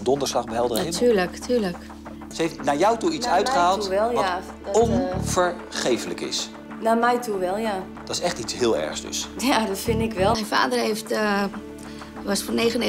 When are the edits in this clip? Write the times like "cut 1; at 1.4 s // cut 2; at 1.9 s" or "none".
cut 1; at 2.3 s // cut 2; at 10.3 s